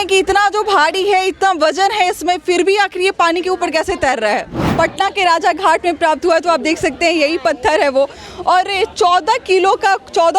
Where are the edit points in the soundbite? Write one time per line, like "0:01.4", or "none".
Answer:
0:04.6